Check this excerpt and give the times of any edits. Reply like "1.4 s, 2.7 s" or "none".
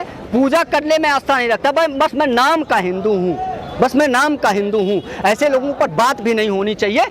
none